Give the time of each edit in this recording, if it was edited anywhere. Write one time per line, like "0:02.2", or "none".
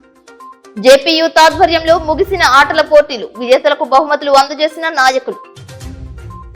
none